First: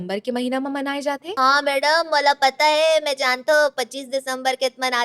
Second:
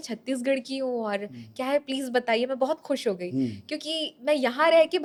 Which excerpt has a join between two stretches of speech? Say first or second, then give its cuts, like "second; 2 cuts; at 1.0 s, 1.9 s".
first; 1 cut; at 1.3 s